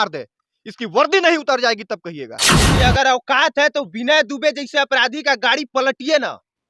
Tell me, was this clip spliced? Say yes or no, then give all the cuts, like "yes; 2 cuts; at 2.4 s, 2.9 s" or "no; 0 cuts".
yes; 1 cut; at 2.7 s